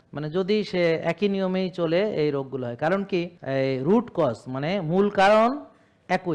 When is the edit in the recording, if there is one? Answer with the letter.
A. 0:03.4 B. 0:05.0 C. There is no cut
A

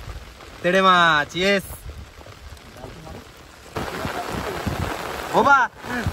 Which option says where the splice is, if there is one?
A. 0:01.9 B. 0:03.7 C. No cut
B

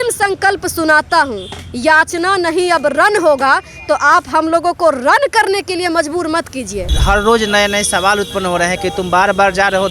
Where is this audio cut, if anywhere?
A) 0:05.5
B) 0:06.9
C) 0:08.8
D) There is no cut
B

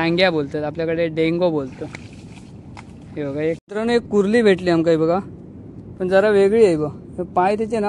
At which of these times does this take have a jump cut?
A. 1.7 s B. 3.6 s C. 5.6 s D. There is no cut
B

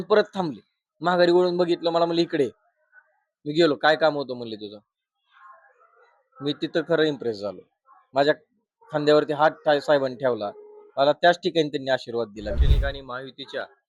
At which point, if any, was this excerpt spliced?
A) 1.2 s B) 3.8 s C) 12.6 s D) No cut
C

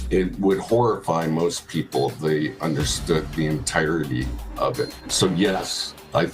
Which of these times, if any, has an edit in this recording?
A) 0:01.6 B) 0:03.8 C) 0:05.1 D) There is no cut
C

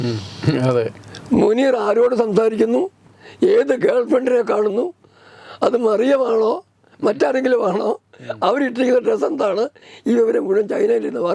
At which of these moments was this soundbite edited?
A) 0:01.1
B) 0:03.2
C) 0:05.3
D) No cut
D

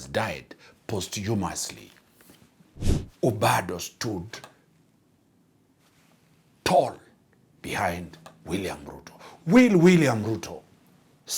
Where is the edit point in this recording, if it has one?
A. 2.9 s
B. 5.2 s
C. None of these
A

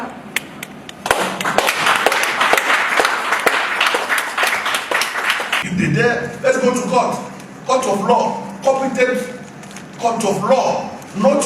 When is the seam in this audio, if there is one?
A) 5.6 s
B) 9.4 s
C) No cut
A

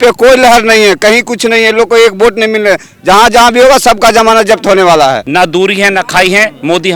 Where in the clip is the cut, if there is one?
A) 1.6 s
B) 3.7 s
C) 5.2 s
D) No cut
C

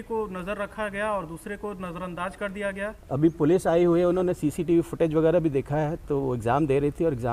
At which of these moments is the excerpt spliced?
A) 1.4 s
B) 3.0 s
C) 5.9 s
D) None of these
B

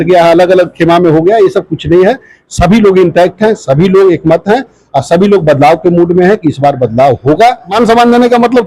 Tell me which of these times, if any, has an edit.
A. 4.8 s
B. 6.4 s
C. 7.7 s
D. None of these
C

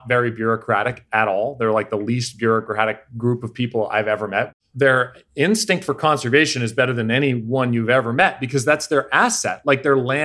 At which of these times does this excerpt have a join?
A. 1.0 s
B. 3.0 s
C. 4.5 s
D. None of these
C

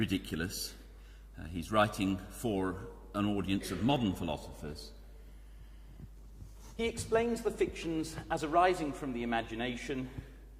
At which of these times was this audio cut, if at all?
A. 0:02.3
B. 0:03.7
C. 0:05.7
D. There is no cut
B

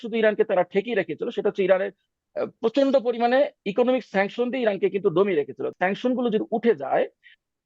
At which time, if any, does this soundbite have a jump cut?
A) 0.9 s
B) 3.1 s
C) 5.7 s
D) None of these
C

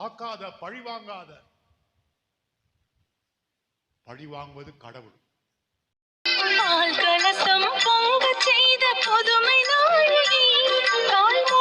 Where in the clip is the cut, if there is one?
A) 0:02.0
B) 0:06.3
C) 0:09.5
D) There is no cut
B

